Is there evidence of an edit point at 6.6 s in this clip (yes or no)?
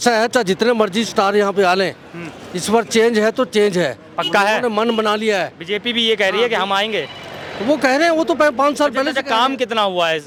no